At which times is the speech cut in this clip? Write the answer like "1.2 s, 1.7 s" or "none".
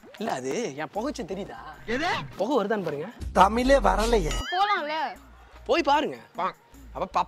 3.1 s, 4.4 s